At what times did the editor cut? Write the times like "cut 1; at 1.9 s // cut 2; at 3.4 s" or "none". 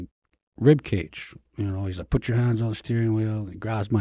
cut 1; at 1.5 s